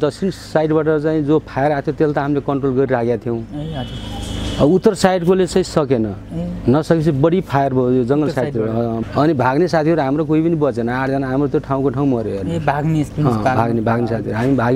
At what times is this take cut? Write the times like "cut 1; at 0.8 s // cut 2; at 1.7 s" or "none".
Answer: cut 1; at 9.0 s